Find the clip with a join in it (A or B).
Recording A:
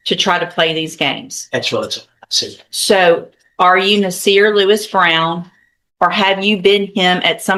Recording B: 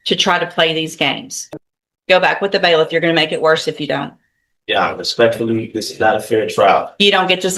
B